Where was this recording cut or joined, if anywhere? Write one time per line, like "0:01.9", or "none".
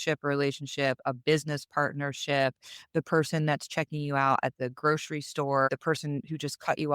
0:05.7